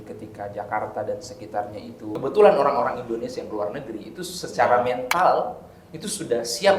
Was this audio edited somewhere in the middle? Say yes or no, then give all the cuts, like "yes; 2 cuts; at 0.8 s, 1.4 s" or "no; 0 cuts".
yes; 1 cut; at 2.1 s